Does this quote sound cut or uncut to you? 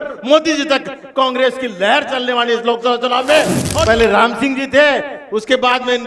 cut